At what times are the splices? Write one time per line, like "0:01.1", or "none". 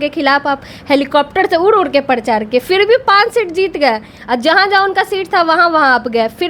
none